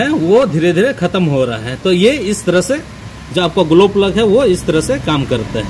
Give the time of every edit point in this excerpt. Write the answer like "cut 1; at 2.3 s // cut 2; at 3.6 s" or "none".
none